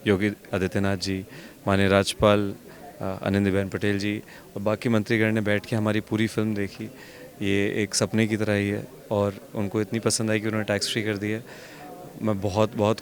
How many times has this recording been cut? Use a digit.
0